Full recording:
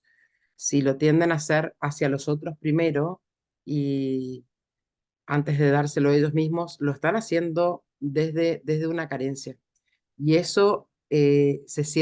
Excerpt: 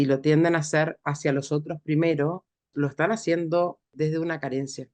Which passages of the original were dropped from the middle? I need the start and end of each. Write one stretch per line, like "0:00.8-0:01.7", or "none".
0:03.4-0:06.7
0:08.0-0:08.6